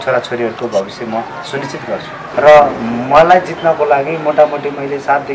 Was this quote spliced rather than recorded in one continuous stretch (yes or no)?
yes